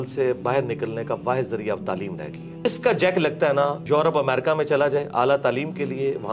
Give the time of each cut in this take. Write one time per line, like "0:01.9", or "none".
0:02.6
0:03.8